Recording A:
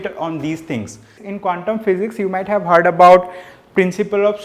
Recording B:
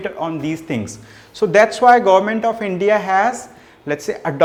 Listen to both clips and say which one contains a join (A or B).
A